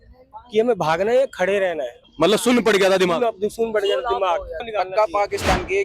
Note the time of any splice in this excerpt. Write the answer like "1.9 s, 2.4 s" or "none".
2.0 s, 4.6 s